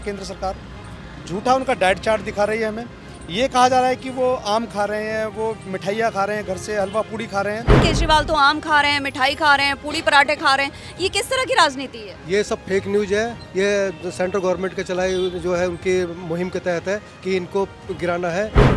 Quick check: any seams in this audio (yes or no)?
yes